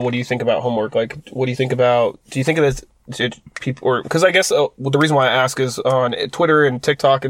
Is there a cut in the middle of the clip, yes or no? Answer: no